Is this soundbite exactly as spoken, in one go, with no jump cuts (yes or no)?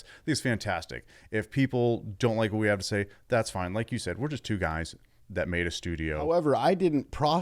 no